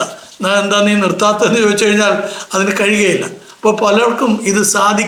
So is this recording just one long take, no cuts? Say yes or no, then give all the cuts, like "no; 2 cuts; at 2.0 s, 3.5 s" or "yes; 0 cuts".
yes; 0 cuts